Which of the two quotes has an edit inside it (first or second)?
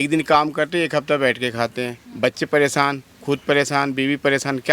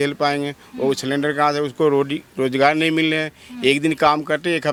first